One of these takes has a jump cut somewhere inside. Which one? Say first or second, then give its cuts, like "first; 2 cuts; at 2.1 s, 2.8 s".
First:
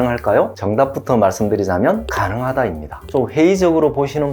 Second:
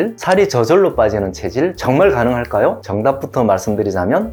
first; 1 cut; at 3.1 s